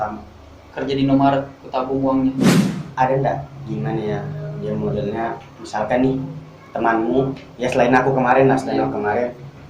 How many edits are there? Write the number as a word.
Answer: one